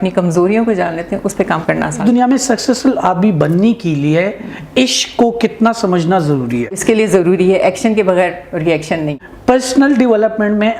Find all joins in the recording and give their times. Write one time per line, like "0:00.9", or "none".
0:02.0
0:06.8
0:09.2